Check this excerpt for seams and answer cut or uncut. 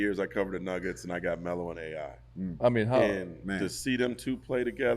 cut